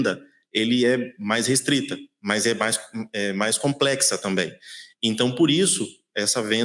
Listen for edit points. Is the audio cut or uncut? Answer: uncut